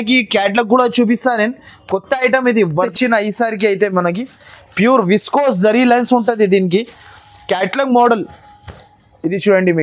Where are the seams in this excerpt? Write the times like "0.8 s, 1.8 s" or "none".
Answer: 2.9 s